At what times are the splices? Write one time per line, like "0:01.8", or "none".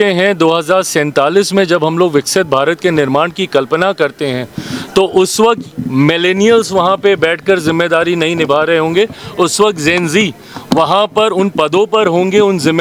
none